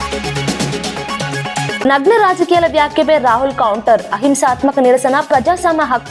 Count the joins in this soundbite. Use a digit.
1